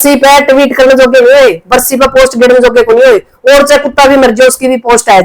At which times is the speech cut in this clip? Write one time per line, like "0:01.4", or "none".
none